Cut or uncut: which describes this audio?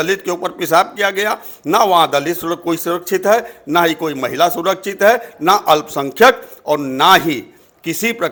uncut